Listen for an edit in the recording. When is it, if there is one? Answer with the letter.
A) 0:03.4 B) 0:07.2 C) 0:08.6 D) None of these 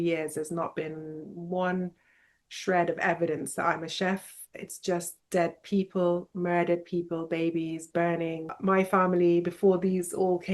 C